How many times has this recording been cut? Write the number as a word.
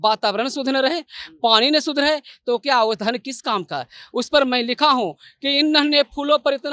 zero